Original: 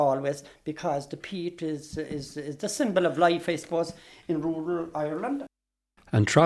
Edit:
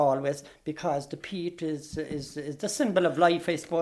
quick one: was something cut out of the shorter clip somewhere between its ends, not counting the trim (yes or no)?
no